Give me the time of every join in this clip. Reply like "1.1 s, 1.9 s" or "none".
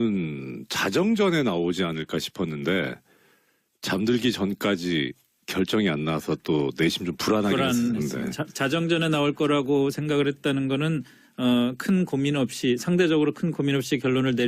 6.2 s